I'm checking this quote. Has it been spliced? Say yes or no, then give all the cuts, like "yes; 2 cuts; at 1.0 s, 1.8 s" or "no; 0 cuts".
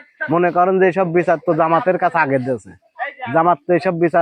no; 0 cuts